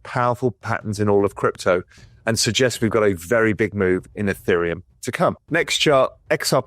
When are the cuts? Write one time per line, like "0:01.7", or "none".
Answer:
0:05.4